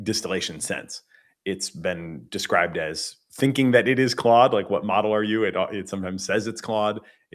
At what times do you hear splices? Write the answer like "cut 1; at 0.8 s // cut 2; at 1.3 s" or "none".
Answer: cut 1; at 5.9 s